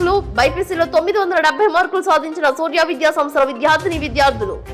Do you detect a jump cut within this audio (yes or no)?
no